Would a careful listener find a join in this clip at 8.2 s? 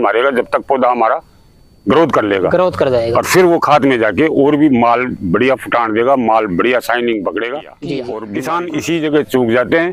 yes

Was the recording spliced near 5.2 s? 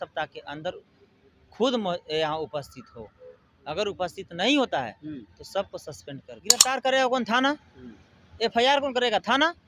no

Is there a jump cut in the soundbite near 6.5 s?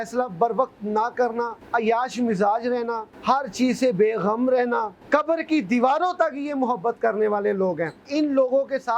no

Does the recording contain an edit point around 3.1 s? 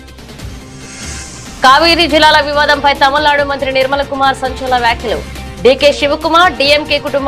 no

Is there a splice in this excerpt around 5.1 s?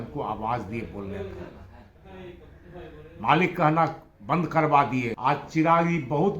yes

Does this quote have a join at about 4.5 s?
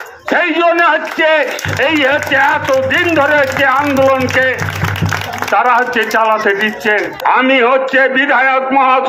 no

